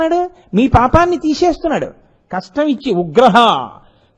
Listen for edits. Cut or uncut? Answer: uncut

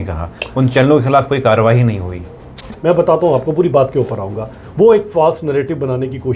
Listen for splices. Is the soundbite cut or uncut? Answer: cut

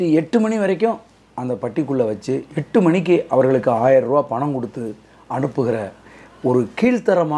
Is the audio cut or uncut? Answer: uncut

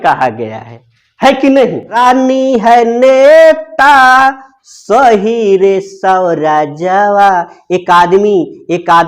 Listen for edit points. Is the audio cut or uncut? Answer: cut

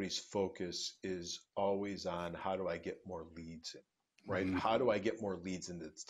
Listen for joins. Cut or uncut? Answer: uncut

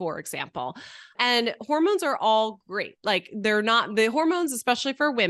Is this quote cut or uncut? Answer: uncut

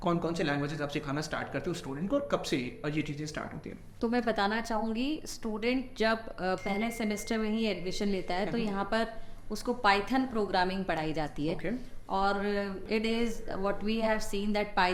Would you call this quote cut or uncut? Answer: uncut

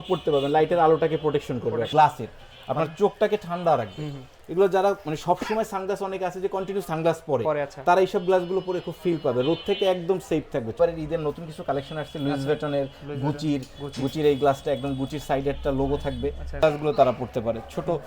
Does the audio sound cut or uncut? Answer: cut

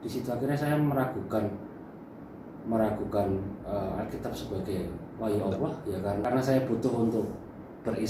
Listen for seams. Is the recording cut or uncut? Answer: cut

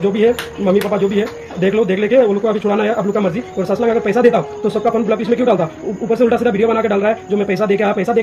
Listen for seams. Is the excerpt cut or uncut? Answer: uncut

